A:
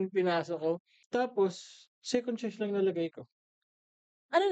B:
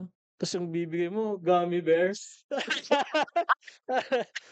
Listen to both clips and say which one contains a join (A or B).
A